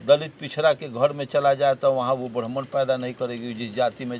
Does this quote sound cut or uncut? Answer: uncut